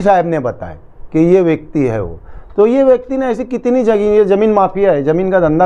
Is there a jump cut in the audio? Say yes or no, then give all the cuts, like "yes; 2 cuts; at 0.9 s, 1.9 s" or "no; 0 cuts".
no; 0 cuts